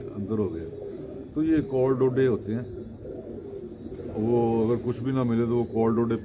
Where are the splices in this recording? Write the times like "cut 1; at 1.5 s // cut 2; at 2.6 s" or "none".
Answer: none